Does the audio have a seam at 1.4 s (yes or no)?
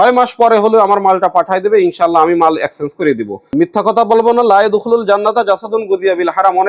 no